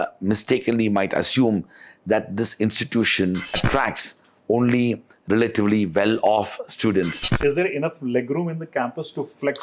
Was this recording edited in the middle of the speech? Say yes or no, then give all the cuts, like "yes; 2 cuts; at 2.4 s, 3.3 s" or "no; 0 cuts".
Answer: yes; 2 cuts; at 3.6 s, 7.3 s